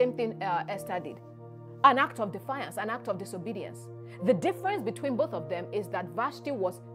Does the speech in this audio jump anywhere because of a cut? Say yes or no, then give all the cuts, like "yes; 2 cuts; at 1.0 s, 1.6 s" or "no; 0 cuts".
no; 0 cuts